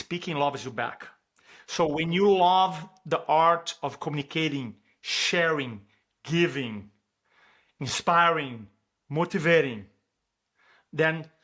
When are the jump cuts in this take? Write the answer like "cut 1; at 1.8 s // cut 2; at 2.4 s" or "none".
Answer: none